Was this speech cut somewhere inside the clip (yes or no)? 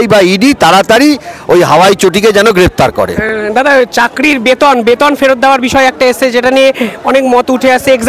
no